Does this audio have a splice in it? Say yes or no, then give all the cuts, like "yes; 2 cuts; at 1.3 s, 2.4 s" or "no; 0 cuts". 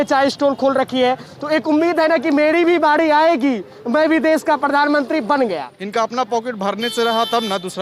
yes; 1 cut; at 5.8 s